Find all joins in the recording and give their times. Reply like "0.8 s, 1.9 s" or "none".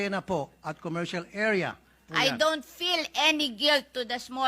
2.4 s